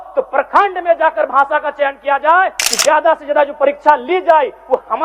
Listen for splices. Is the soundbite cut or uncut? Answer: cut